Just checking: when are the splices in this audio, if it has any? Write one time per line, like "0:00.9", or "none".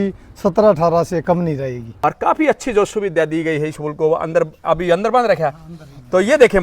0:01.8